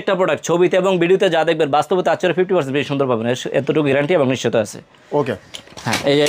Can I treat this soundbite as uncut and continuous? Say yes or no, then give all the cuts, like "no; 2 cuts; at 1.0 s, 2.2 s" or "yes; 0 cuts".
yes; 0 cuts